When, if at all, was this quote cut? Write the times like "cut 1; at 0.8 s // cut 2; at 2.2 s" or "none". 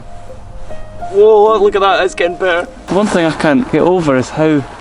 cut 1; at 2.8 s // cut 2; at 3.7 s